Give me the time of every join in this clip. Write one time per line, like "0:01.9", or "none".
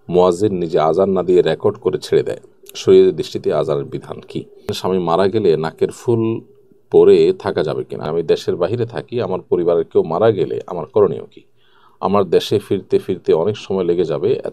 0:04.6
0:07.9